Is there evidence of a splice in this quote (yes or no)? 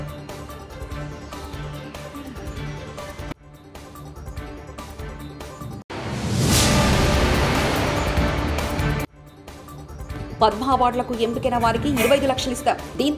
yes